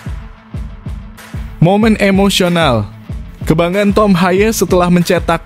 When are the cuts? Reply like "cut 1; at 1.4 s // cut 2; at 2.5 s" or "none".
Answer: cut 1; at 1.6 s